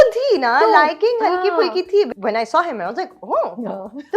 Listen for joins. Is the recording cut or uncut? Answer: cut